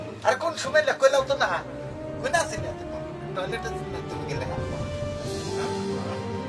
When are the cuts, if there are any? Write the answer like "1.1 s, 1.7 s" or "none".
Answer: none